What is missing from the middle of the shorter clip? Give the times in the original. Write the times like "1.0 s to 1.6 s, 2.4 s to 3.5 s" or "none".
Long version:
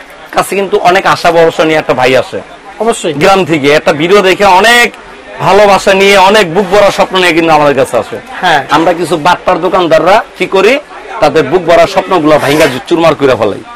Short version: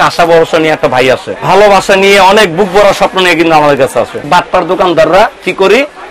2.4 s to 5.3 s, 8.2 s to 9.2 s